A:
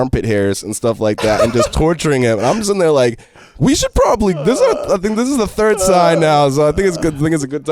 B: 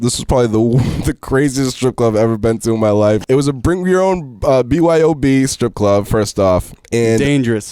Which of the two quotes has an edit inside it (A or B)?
B